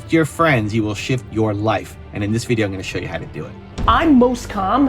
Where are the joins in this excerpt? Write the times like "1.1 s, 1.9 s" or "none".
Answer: 3.6 s